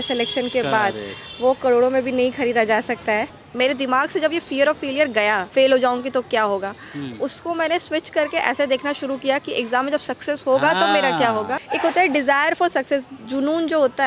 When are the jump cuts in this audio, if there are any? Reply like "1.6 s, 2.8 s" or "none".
3.4 s, 5.5 s, 11.6 s